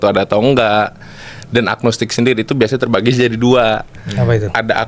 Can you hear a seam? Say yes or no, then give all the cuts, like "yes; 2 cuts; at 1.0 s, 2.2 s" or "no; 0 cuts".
no; 0 cuts